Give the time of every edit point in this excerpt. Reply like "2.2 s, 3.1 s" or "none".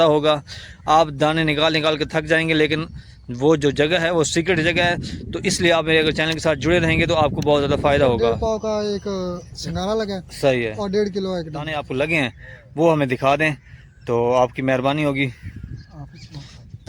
8.2 s, 11.8 s